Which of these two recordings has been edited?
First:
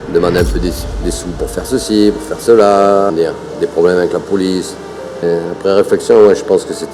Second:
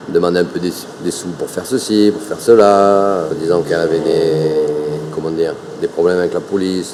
first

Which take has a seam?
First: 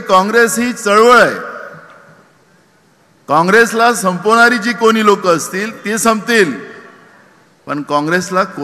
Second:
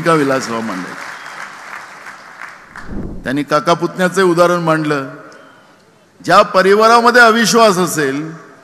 second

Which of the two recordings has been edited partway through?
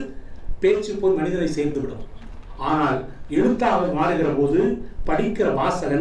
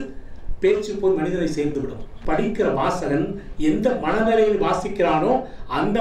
second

